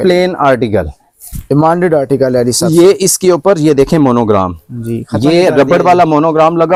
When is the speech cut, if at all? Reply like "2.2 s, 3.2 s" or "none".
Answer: none